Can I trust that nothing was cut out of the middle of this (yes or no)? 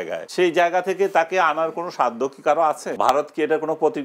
no